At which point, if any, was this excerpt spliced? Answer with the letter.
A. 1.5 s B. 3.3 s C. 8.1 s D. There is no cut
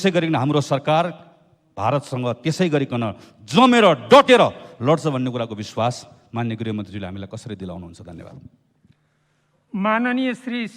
D